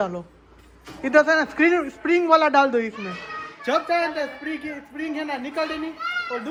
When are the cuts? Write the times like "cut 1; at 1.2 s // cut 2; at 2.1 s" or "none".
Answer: none

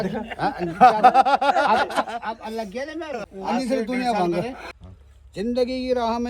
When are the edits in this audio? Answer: cut 1; at 3.3 s // cut 2; at 4.6 s

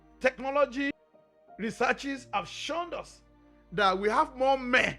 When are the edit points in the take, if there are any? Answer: cut 1; at 0.9 s

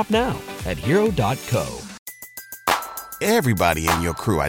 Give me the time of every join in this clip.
cut 1; at 1.9 s

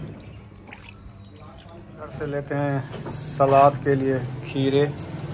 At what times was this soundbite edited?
cut 1; at 2.2 s

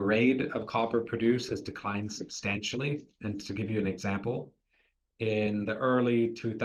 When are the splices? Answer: none

